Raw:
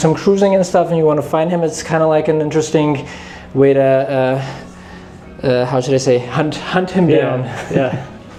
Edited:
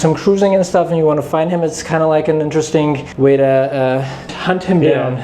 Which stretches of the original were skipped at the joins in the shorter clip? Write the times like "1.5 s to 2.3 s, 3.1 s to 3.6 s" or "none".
3.1 s to 3.4 s, 4.7 s to 6.6 s

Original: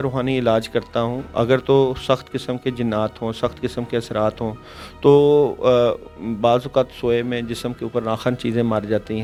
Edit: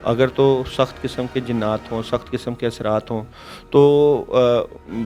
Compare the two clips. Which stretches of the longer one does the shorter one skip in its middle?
none

